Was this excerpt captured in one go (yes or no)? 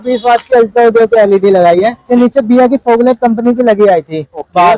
no